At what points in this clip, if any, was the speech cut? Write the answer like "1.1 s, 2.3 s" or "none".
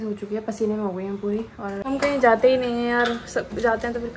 1.8 s